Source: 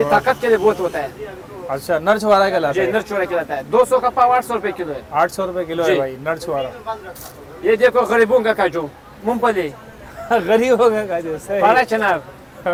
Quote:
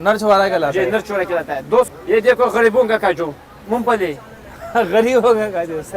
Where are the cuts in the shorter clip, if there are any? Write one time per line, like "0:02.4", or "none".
0:01.9